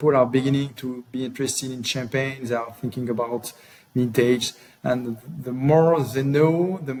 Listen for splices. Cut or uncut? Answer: uncut